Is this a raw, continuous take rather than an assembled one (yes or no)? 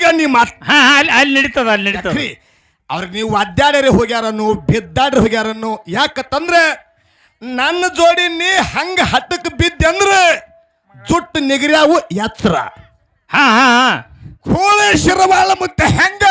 no